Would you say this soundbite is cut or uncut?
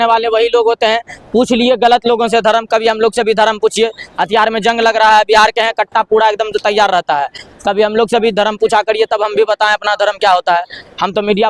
uncut